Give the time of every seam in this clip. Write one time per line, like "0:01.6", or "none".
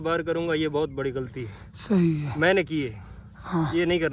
none